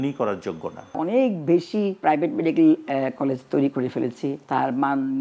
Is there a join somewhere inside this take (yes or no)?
yes